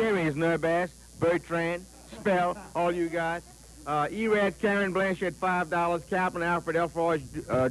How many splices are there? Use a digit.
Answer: 1